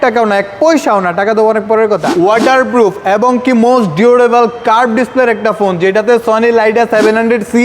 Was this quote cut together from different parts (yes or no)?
yes